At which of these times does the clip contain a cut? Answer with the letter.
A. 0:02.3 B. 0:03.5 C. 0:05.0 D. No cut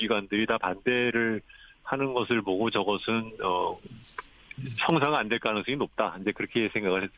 C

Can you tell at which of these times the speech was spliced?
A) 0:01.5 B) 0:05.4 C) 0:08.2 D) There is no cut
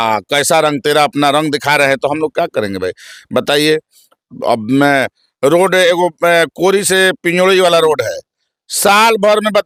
D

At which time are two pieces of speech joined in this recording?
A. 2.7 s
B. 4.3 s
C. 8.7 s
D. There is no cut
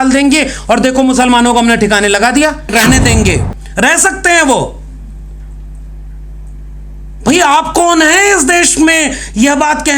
A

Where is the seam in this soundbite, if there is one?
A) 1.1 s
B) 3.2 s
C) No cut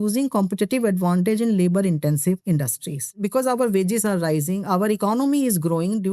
B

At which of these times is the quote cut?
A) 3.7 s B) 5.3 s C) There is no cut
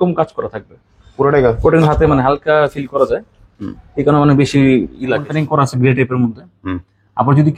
B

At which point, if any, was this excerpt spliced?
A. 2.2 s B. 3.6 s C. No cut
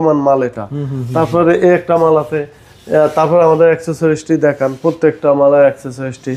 C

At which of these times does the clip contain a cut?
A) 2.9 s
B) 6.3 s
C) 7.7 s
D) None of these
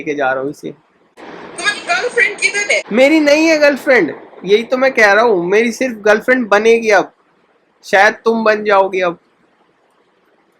A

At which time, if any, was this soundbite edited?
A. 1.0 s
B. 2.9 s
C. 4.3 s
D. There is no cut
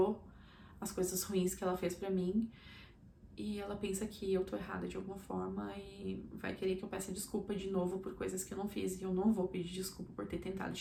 D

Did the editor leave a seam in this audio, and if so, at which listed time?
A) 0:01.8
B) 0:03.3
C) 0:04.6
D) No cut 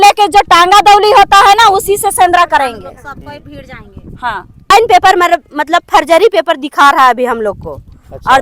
C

